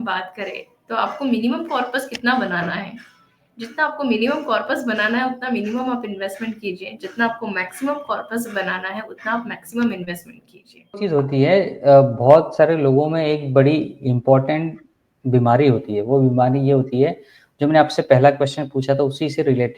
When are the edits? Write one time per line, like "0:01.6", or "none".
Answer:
0:11.0